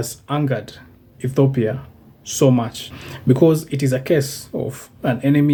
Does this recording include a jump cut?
no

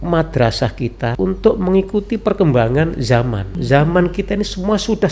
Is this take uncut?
no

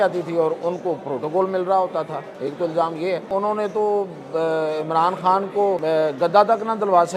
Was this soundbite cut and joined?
yes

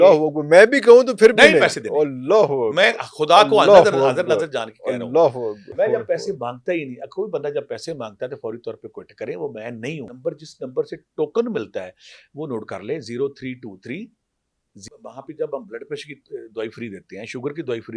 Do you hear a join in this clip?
yes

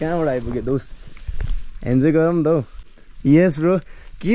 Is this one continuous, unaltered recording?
no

